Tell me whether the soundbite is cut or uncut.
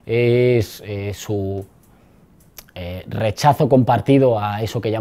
uncut